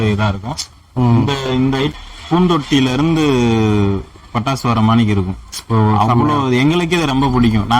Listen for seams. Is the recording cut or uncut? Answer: cut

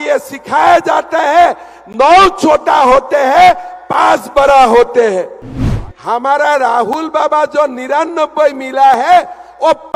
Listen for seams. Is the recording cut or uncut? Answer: cut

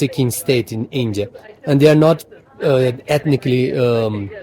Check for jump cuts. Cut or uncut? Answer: uncut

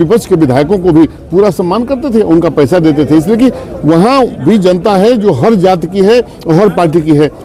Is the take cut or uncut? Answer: uncut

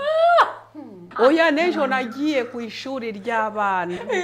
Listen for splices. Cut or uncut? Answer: cut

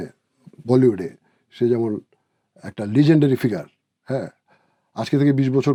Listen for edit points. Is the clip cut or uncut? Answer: uncut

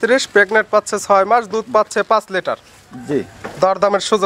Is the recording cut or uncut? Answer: uncut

